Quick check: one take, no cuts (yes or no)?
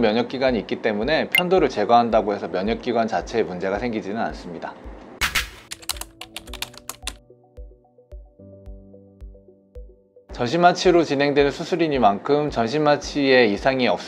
yes